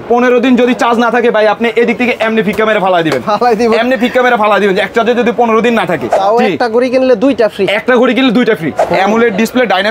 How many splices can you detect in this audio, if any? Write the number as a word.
two